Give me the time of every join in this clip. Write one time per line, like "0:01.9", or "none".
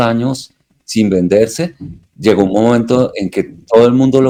none